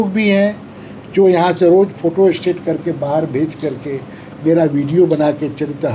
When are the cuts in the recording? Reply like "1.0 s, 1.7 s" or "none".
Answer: none